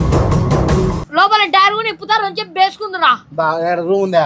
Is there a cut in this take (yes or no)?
yes